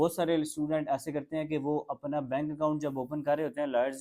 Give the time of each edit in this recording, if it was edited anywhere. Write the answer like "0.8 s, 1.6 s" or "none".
none